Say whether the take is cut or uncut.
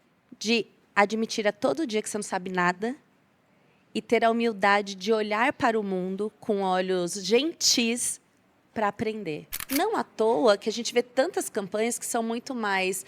cut